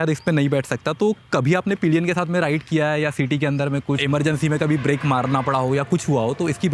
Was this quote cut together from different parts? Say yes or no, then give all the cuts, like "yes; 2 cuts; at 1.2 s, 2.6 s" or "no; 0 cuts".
yes; 1 cut; at 4.0 s